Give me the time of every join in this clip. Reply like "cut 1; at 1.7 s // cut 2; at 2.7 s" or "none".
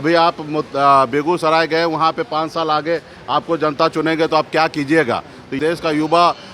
cut 1; at 5.6 s